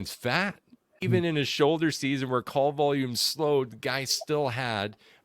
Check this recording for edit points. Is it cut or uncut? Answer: cut